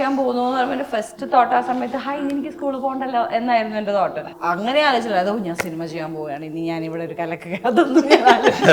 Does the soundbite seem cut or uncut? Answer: cut